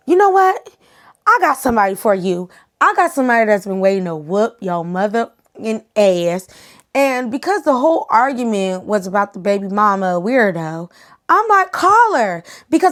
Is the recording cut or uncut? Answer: uncut